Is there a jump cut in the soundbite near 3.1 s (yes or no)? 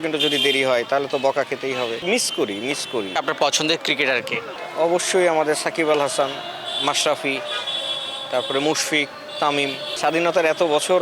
yes